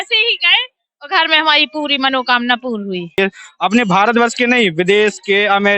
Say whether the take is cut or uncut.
cut